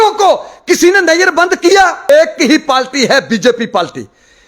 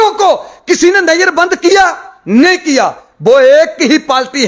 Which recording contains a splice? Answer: first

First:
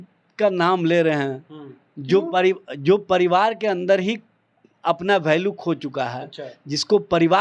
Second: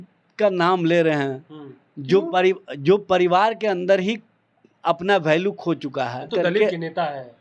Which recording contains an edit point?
second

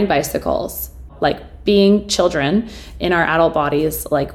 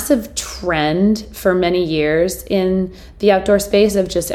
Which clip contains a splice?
first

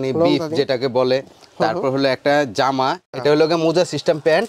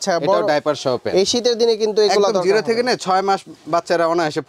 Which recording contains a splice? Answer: first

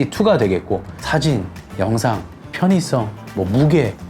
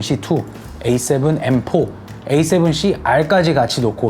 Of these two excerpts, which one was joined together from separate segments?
first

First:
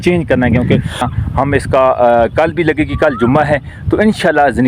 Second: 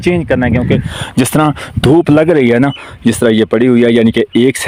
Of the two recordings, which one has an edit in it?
first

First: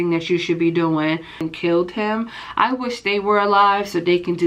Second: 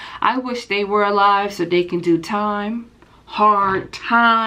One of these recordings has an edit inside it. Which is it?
first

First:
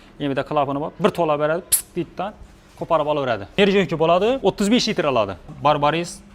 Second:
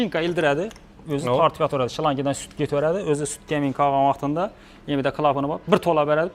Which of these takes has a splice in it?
first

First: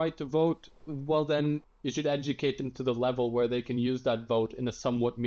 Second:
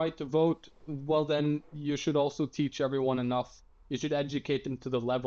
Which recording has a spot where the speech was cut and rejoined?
first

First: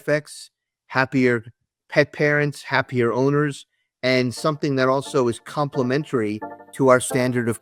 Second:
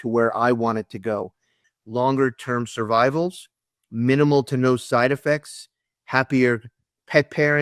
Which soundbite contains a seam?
second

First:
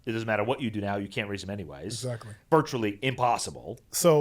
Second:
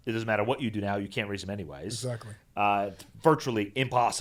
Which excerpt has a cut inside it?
first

